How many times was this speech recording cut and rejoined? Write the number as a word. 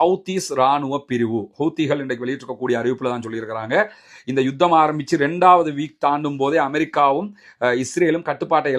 zero